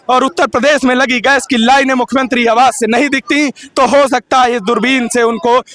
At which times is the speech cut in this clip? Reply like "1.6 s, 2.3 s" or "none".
none